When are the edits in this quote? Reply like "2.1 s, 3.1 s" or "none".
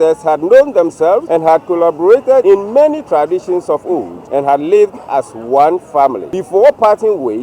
1.2 s, 2.4 s, 4.2 s, 6.3 s